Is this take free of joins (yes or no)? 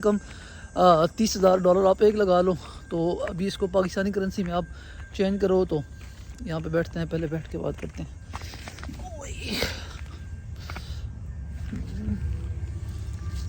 yes